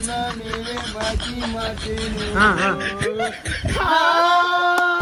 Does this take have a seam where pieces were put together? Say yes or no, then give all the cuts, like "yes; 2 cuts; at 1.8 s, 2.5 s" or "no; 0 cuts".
no; 0 cuts